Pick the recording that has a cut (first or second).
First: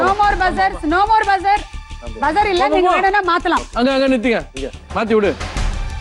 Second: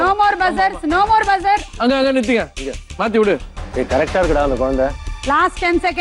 second